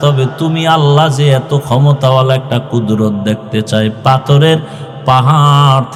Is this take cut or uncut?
uncut